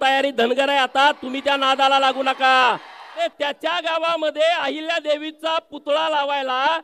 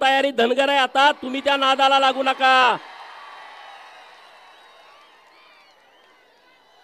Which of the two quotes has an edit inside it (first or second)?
first